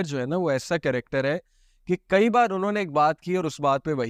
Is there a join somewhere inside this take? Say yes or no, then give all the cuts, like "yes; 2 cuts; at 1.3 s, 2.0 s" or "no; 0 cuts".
no; 0 cuts